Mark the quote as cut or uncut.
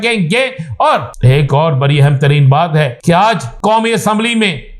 cut